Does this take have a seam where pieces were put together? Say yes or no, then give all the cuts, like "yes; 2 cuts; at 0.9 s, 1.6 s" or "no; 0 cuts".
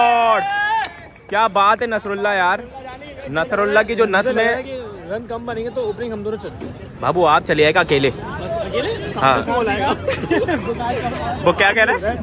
no; 0 cuts